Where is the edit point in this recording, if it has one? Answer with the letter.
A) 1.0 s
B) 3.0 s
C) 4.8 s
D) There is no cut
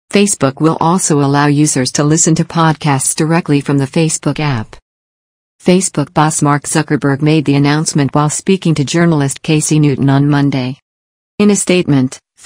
D